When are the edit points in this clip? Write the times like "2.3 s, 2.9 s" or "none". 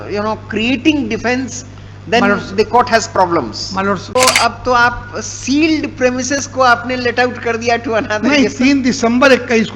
4.2 s